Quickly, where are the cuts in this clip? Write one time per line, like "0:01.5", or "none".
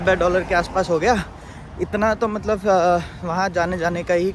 none